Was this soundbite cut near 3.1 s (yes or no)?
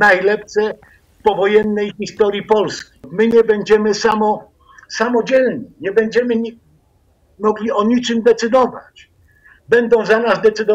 yes